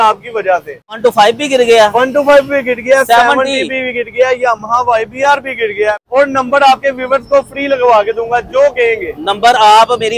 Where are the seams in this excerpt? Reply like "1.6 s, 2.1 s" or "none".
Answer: 1.0 s, 6.0 s